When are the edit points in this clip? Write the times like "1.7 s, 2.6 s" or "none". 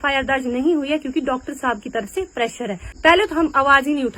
2.9 s

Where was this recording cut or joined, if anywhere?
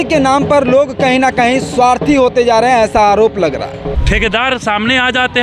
3.9 s

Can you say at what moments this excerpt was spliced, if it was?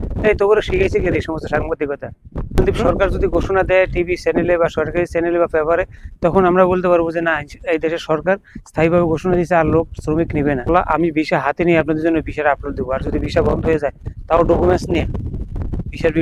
2.6 s, 10.7 s

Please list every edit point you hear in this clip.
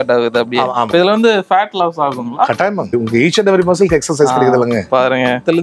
2.9 s

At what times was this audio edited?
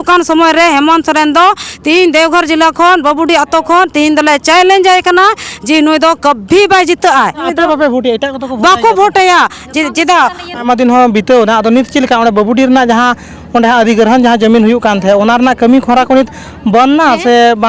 7.4 s, 10.6 s

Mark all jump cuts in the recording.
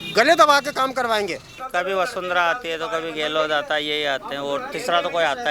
1.6 s

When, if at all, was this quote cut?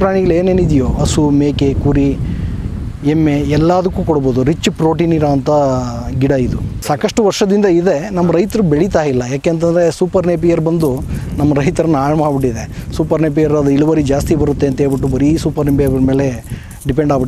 1.0 s, 6.8 s

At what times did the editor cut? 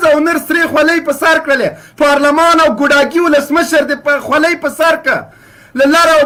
none

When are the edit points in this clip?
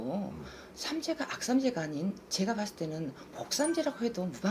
none

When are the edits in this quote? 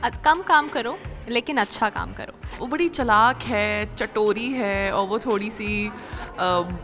2.6 s

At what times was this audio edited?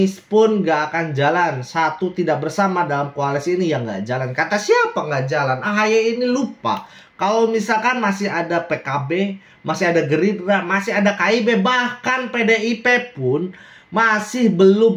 none

